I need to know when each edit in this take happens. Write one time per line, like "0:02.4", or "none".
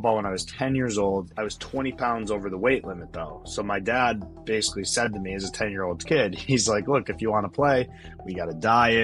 0:01.3